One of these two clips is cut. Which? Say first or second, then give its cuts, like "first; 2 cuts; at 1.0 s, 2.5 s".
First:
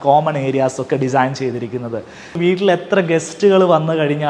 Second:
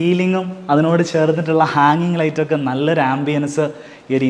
first; 1 cut; at 2.4 s